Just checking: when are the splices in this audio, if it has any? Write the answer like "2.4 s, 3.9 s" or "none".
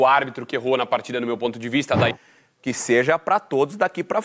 2.1 s